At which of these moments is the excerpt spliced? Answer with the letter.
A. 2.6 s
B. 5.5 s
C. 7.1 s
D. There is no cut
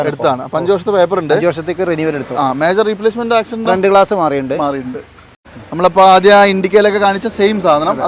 B